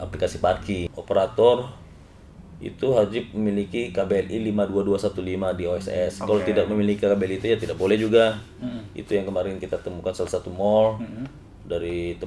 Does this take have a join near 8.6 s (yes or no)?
no